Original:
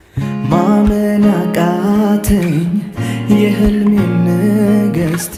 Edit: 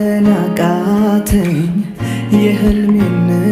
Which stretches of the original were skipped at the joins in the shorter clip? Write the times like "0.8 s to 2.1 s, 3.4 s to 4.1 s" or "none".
none